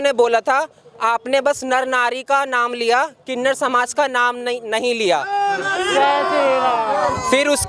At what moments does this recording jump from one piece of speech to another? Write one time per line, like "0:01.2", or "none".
none